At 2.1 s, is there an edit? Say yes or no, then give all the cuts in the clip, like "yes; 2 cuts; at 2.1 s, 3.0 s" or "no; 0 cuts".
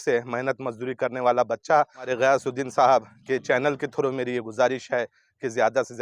yes; 1 cut; at 2.1 s